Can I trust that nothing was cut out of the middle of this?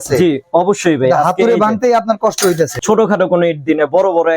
no; 1 cut; at 2.8 s

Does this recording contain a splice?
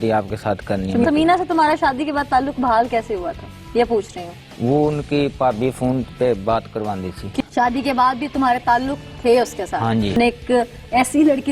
yes; 3 cuts; at 1.1 s, 7.4 s, 10.2 s

